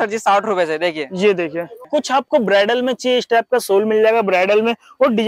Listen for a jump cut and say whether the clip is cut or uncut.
cut